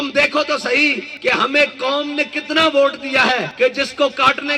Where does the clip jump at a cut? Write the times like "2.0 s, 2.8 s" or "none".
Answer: 1.1 s, 3.5 s